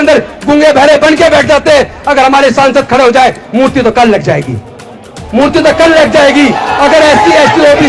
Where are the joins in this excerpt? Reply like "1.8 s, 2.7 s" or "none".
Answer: none